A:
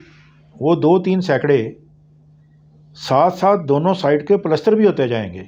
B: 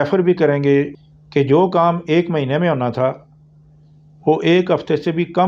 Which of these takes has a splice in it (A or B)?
B